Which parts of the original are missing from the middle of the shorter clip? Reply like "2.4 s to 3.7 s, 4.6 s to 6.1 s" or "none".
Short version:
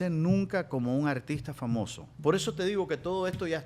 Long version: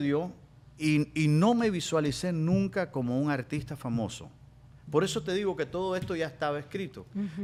4.3 s to 4.7 s